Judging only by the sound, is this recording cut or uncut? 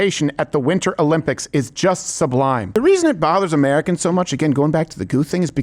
cut